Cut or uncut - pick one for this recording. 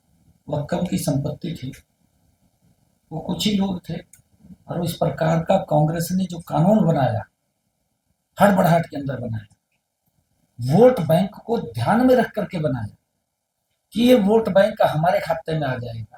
uncut